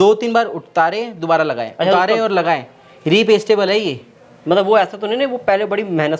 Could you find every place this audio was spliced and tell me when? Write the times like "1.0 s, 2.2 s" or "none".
none